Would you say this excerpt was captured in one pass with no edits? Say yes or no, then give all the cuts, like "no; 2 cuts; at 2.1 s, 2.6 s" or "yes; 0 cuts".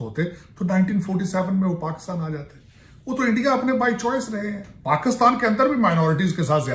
yes; 0 cuts